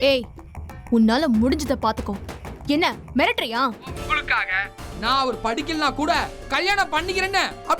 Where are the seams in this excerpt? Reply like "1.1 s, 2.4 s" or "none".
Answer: 4.0 s